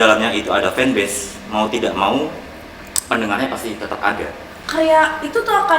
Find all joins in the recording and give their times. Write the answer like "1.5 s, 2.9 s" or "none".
4.5 s